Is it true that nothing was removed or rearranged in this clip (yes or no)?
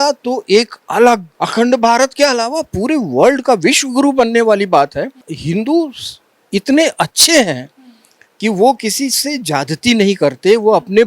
no